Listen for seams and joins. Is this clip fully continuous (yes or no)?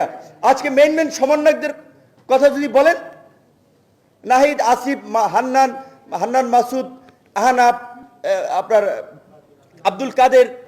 yes